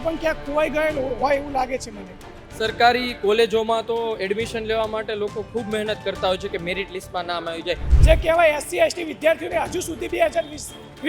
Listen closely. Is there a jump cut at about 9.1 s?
no; 1 cut; at 7.9 s

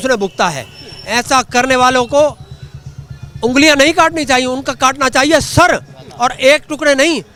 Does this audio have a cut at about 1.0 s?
no; 0 cuts

